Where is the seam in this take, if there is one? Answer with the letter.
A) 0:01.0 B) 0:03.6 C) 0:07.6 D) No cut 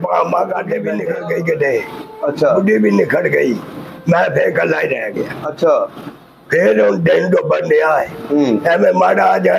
A